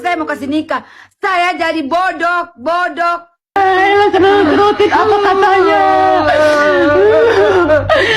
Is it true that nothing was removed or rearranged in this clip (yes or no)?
no